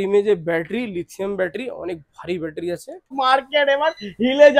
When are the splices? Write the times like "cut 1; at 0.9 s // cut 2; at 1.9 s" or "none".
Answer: cut 1; at 3.1 s